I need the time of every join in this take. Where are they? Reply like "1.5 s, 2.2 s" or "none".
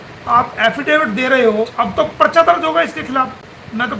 1.7 s